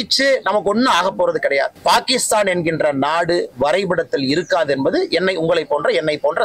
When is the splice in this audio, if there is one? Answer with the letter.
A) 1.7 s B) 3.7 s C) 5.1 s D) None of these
A